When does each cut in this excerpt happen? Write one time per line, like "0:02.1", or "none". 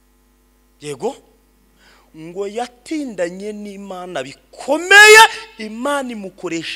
none